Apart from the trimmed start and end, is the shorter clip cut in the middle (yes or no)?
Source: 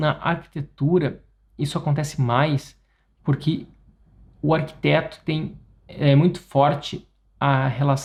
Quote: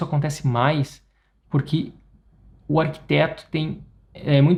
no